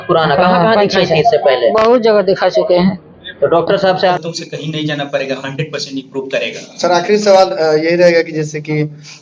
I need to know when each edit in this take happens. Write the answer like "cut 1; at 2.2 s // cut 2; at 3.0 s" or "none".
cut 1; at 4.1 s